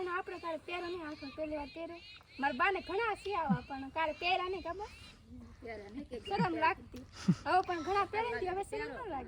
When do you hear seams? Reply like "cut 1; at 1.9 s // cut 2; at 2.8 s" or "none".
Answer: none